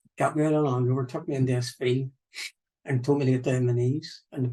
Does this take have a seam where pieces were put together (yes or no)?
no